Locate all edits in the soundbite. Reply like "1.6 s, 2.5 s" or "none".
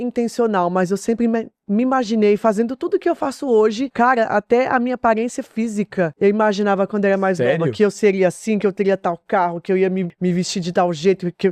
3.9 s, 6.1 s, 10.1 s